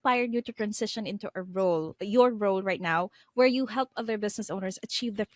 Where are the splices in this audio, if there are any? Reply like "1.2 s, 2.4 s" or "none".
none